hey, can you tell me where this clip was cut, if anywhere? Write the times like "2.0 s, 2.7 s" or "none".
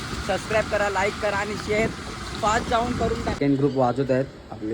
3.4 s